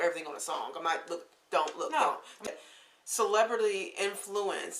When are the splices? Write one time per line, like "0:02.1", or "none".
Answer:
0:02.5